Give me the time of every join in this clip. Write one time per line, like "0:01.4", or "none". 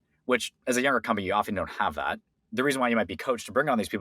0:02.4